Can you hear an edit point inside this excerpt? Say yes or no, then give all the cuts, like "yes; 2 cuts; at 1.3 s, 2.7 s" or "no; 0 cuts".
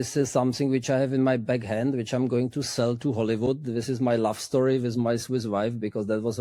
no; 0 cuts